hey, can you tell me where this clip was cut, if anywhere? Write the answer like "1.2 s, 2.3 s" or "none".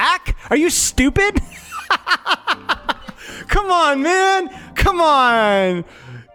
none